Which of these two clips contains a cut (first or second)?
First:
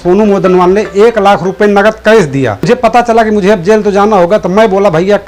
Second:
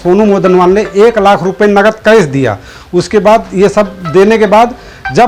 first